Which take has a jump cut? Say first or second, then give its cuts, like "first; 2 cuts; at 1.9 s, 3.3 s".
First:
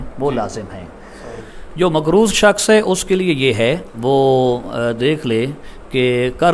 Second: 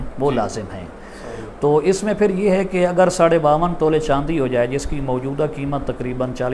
first; 2 cuts; at 1.6 s, 3.9 s